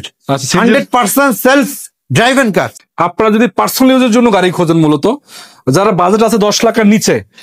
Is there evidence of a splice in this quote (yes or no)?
yes